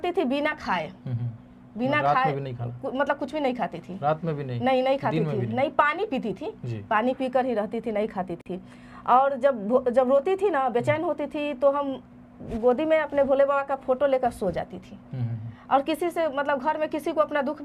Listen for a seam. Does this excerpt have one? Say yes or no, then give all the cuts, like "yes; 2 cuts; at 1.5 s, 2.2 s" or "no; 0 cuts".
no; 0 cuts